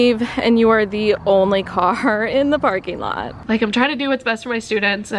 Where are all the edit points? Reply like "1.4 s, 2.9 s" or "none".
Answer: 3.4 s